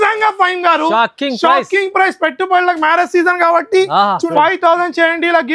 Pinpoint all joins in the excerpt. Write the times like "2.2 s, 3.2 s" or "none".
4.2 s